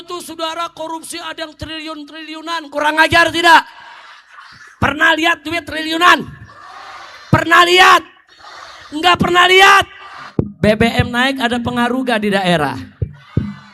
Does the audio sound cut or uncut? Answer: cut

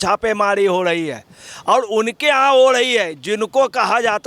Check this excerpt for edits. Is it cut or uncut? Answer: uncut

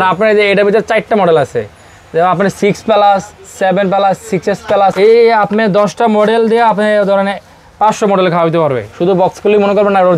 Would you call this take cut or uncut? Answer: cut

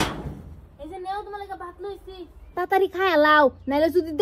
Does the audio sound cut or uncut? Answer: cut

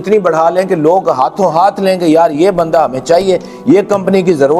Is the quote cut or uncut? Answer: uncut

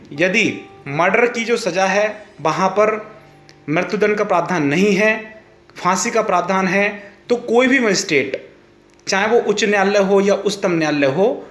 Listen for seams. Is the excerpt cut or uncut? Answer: uncut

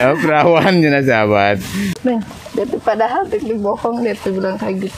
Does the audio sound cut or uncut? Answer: cut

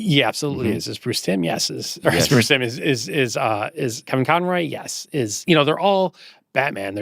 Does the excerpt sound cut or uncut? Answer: uncut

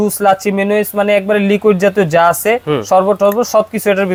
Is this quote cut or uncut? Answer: uncut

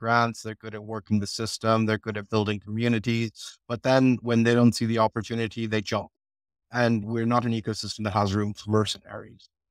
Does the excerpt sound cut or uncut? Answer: uncut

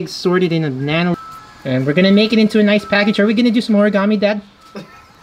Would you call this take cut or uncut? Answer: cut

